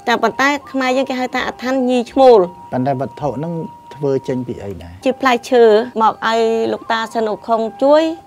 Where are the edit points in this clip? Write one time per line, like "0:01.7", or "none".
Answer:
0:05.0
0:05.9